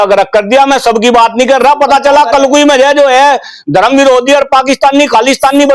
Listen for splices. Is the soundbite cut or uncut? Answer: uncut